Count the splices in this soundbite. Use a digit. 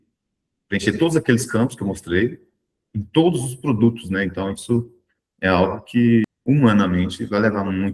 1